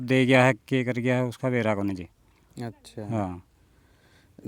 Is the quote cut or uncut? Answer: uncut